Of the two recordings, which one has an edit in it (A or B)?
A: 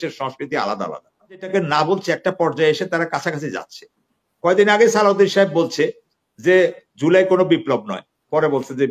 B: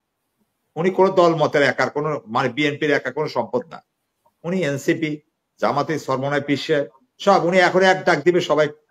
A